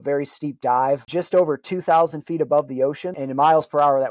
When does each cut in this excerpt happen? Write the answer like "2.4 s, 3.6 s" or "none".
1.1 s, 3.2 s